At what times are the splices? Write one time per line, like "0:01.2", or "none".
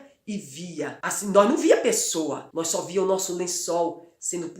0:01.0
0:02.4